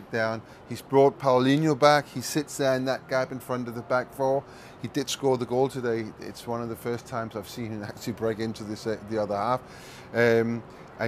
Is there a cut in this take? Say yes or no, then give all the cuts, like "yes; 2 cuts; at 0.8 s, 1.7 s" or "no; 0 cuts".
yes; 1 cut; at 4.0 s